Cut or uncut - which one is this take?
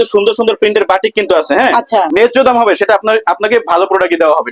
cut